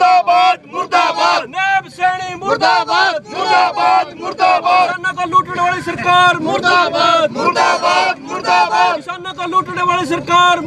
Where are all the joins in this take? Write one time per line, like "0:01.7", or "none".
0:05.0